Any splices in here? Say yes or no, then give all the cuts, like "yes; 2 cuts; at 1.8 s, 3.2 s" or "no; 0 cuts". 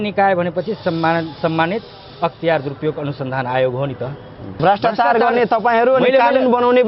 yes; 1 cut; at 4.5 s